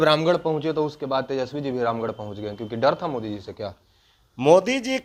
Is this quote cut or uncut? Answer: uncut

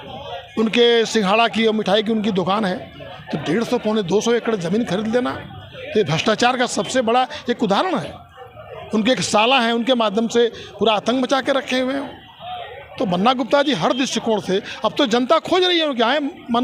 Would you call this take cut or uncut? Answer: uncut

